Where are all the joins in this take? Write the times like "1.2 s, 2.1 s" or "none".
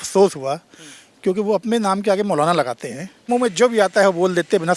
3.3 s